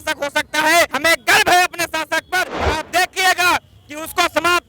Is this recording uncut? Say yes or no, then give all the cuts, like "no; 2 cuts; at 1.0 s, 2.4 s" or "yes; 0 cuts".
no; 2 cuts; at 0.9 s, 2.5 s